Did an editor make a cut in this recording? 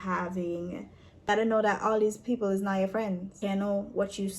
yes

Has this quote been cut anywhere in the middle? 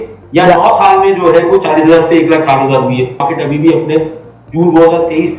yes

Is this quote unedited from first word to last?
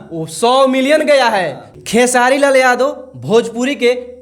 no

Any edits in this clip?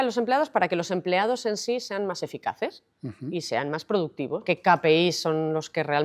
yes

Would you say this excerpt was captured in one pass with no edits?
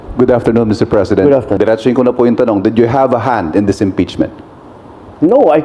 no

